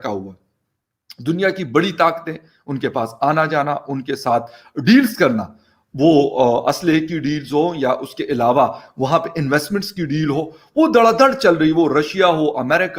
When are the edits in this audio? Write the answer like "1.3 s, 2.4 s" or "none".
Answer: none